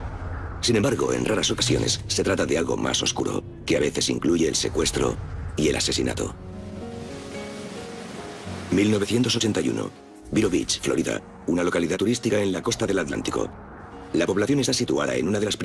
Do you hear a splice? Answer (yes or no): yes